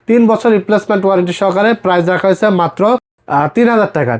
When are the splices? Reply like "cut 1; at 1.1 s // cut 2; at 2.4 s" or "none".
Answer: cut 1; at 3.2 s